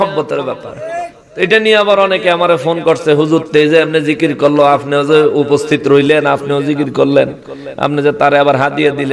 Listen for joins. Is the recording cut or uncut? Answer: uncut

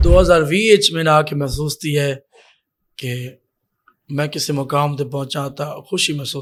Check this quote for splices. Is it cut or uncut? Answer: uncut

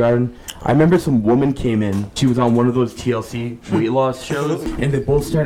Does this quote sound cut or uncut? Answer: cut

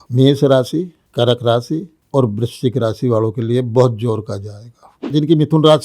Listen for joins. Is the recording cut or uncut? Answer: cut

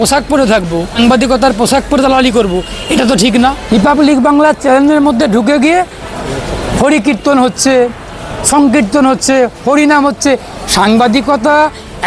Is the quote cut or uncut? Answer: cut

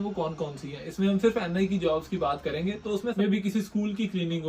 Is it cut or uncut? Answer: cut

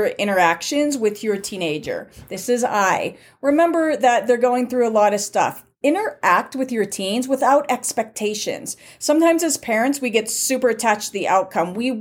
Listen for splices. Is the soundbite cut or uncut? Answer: uncut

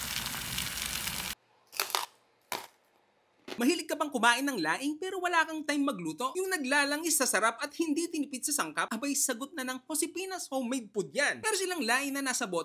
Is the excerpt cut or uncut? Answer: cut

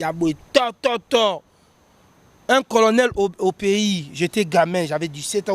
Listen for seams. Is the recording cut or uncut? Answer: uncut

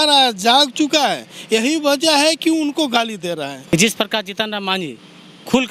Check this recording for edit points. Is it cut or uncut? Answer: cut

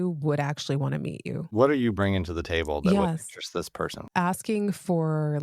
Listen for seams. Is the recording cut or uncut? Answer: cut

